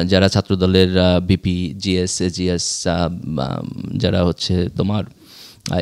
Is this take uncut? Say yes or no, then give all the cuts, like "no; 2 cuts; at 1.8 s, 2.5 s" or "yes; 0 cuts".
yes; 0 cuts